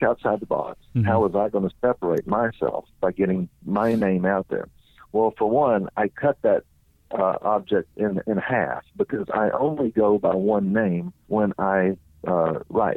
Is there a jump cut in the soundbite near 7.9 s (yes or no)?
no